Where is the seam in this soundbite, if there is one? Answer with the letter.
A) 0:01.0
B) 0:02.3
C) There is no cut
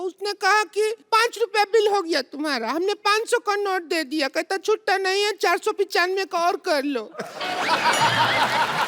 A